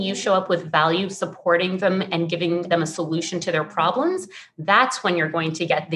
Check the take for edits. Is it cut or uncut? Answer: uncut